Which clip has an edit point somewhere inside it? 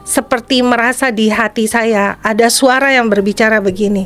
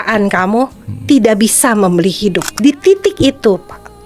second; 1 cut; at 2.5 s

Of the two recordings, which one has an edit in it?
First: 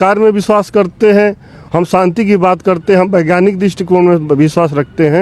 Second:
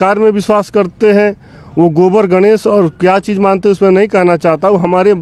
first; 1 cut; at 1.5 s

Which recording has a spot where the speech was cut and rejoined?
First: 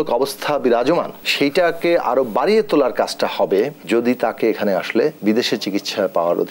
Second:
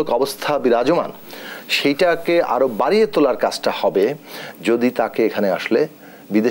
first; 3 cuts; at 1.2 s, 3.8 s, 5.2 s

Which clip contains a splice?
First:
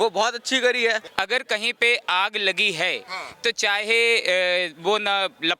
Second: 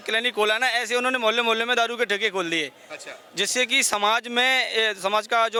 first; 1 cut; at 1.1 s

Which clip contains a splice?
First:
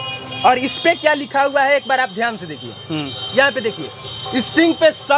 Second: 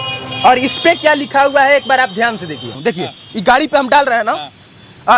second; 1 cut; at 2.8 s

